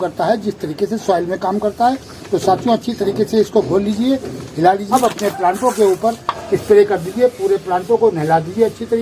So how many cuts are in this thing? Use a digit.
2